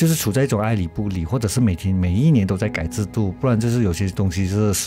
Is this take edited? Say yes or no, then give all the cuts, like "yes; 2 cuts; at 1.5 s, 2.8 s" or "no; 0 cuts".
no; 0 cuts